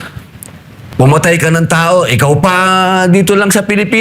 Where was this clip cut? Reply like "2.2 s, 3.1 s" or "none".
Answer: none